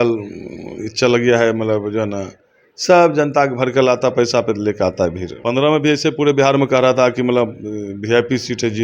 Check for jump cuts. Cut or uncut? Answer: cut